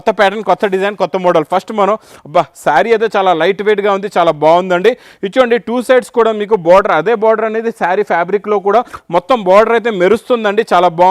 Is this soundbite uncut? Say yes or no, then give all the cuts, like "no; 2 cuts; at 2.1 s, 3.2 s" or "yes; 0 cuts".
yes; 0 cuts